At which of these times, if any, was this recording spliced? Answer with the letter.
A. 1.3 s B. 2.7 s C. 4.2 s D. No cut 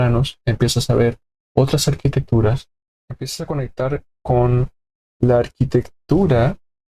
B